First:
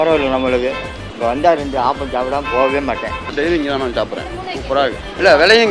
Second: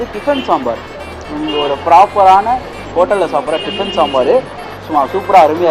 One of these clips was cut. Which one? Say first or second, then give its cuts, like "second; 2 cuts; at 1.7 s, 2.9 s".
first; 1 cut; at 3.3 s